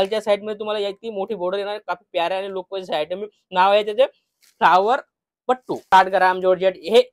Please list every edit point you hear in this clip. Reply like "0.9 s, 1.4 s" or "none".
5.8 s